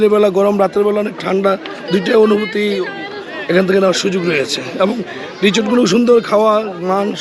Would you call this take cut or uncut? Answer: uncut